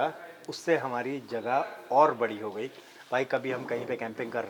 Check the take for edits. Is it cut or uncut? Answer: uncut